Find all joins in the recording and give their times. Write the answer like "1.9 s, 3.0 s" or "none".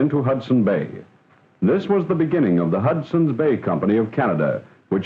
none